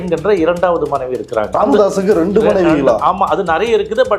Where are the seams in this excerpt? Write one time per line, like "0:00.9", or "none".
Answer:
0:01.5